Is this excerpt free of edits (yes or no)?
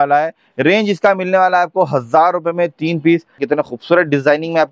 no